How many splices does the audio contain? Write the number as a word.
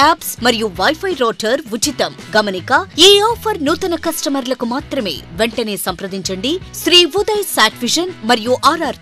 one